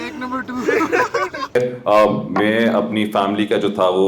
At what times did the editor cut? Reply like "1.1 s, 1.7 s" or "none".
1.8 s